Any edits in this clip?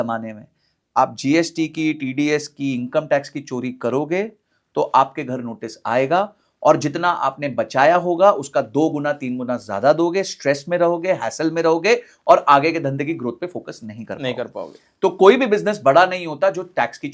no; 0 cuts

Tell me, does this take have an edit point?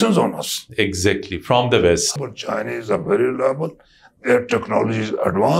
yes; 1 cut; at 2.1 s

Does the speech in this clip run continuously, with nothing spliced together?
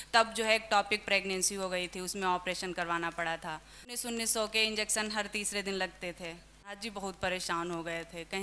no; 2 cuts; at 4.0 s, 6.8 s

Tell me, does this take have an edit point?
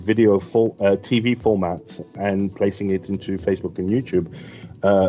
no; 0 cuts

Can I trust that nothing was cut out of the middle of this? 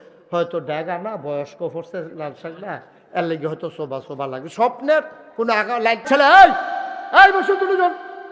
no; 1 cut; at 6.1 s

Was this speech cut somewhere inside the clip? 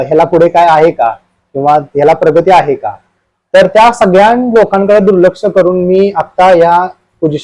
no; 0 cuts

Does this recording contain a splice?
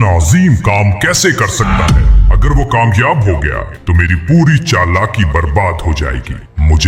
no; 0 cuts

